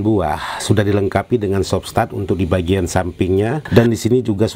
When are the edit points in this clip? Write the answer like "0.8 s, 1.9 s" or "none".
3.6 s